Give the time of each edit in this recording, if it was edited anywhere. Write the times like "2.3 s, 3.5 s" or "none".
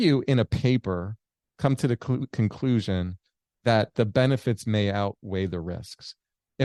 none